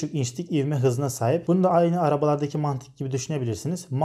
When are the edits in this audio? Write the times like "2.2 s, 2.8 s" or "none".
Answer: 1.4 s